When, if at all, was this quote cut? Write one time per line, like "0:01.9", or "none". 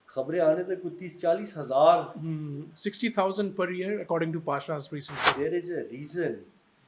0:05.3